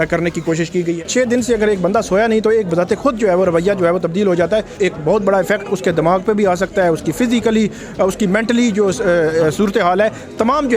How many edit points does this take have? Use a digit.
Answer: 2